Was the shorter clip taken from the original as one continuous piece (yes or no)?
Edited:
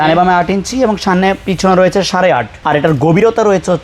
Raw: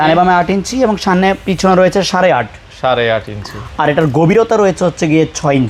no